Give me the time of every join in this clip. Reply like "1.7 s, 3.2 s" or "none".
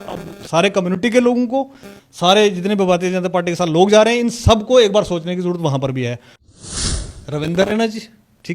6.6 s

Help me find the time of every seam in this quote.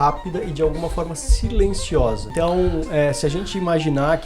2.3 s

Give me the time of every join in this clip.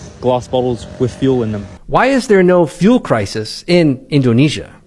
1.7 s

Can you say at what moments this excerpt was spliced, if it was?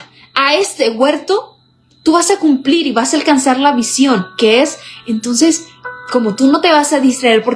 none

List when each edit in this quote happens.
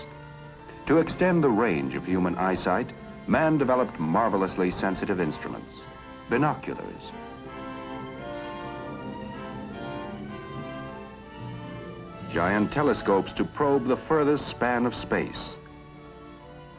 5.2 s

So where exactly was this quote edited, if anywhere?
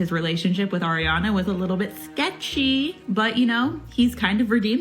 3.0 s

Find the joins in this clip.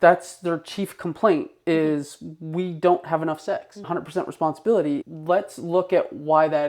3.9 s, 5.0 s

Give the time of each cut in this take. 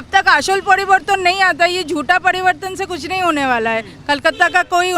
none

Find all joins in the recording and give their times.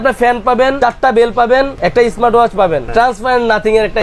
0.8 s, 1.8 s, 2.9 s

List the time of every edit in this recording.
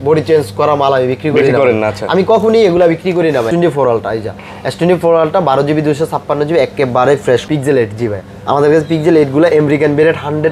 3.5 s, 7.4 s

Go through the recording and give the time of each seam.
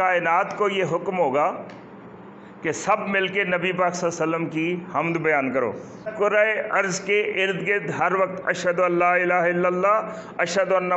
6.1 s

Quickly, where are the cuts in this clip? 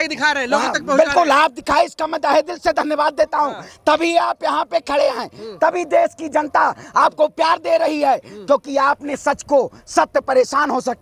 none

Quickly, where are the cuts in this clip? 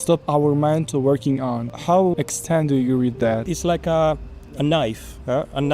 2.1 s, 3.5 s

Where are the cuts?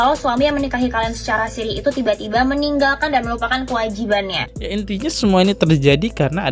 4.4 s

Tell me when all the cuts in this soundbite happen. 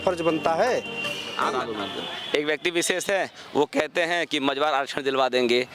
1.6 s

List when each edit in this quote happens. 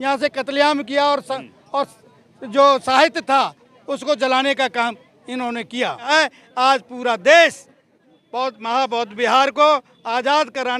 6.1 s

